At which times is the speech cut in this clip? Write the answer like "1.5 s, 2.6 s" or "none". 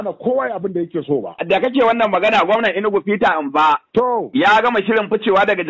4.3 s